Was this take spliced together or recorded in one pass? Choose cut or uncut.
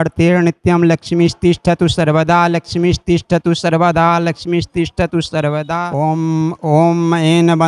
cut